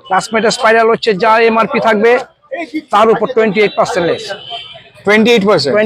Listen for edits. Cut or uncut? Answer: uncut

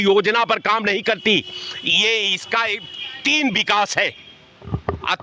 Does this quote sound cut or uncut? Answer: uncut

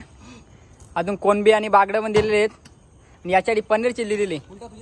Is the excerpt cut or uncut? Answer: uncut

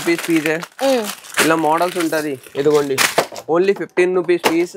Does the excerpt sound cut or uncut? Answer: uncut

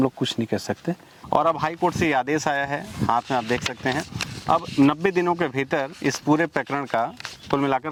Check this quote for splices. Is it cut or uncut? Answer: uncut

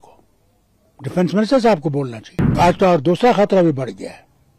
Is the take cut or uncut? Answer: cut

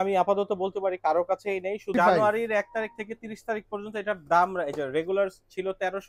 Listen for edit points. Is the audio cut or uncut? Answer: cut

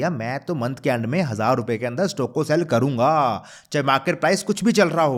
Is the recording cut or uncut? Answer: uncut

